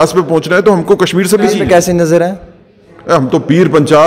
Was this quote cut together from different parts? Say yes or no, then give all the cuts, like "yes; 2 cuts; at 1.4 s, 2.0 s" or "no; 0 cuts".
yes; 1 cut; at 1.5 s